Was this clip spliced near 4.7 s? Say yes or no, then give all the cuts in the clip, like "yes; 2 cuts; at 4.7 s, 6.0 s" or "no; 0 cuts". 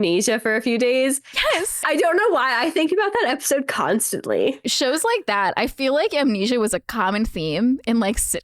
yes; 2 cuts; at 1.8 s, 4.7 s